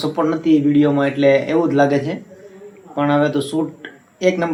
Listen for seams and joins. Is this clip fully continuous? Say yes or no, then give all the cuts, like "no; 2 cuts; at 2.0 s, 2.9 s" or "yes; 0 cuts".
yes; 0 cuts